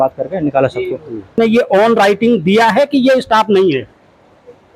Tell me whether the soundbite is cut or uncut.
cut